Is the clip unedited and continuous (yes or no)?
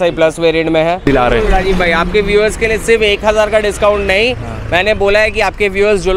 no